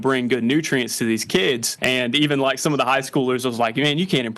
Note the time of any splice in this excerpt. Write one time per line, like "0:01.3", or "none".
0:01.7